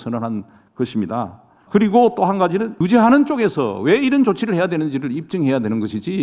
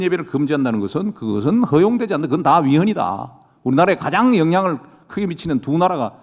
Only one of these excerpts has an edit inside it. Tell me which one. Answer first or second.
first